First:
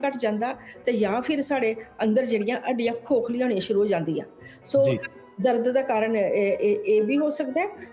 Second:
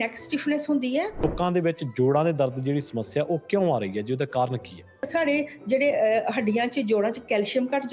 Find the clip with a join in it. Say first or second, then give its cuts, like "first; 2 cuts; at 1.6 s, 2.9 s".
second; 2 cuts; at 1.2 s, 5.1 s